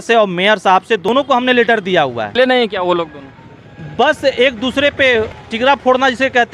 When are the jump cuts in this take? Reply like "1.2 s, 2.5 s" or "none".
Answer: 1.1 s, 2.4 s, 5.4 s

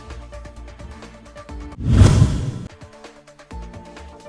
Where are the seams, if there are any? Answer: none

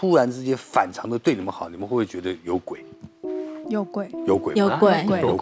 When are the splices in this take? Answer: none

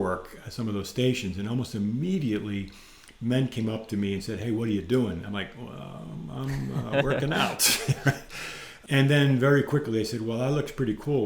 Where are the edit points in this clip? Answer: 8.7 s

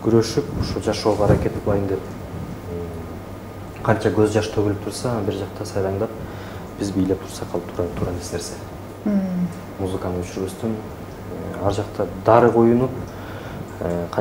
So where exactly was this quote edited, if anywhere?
none

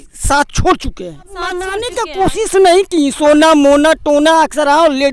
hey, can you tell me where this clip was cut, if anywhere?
1.5 s

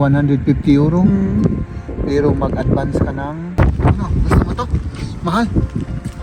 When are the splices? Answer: 3.6 s

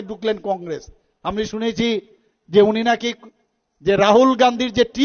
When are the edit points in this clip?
none

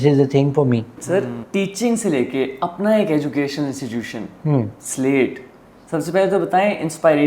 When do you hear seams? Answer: 1.0 s

